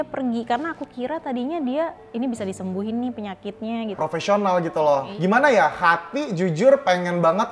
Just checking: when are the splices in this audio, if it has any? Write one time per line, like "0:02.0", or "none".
0:04.0
0:05.1